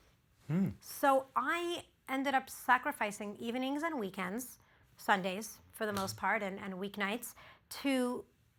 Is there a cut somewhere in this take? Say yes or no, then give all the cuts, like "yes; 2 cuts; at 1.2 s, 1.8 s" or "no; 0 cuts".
no; 0 cuts